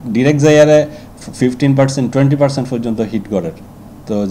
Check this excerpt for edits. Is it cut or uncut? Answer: uncut